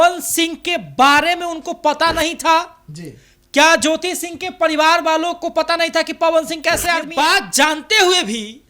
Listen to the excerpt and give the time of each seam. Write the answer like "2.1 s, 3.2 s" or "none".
7.1 s

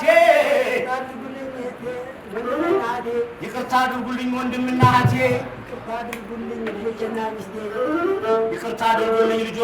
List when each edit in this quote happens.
none

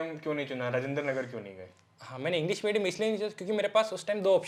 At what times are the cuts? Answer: none

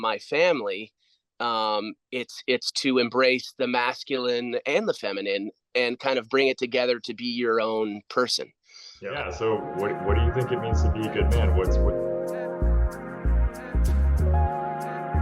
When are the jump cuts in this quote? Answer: 8.9 s

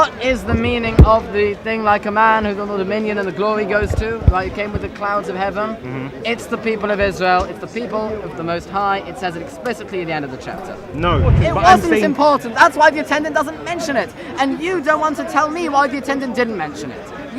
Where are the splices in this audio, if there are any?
11.4 s

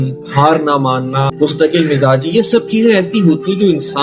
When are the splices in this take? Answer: 1.3 s

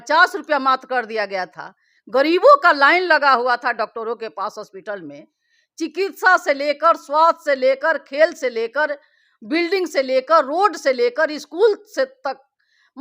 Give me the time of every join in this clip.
none

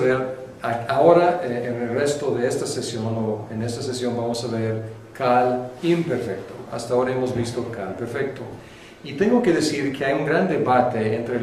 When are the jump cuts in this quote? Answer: none

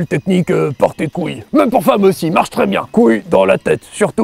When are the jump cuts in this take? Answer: 1.4 s, 2.8 s

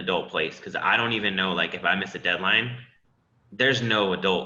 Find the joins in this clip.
none

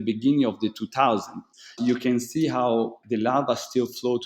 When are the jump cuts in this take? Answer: 1.8 s, 3.0 s

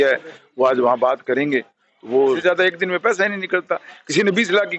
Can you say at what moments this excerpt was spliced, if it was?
2.4 s

